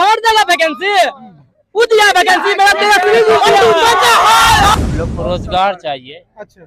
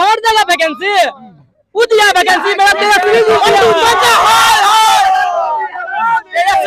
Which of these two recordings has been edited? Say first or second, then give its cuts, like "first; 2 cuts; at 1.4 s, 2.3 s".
first; 1 cut; at 4.7 s